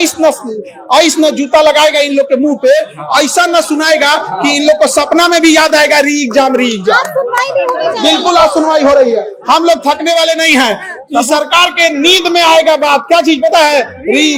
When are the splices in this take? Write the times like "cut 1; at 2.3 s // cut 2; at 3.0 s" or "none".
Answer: none